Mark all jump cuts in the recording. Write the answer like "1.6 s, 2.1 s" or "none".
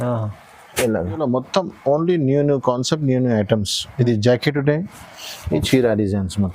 1.2 s